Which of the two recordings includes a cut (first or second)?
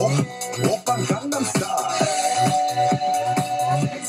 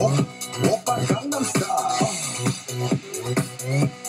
first